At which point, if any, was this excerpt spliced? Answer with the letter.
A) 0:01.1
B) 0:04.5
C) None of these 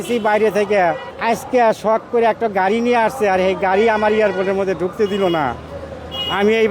A